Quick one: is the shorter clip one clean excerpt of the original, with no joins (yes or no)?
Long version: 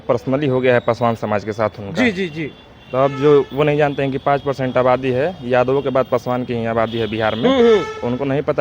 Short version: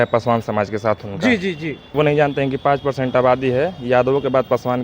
no